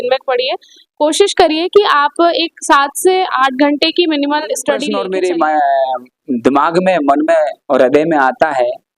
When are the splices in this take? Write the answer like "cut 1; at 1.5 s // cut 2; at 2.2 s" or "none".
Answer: cut 1; at 4.9 s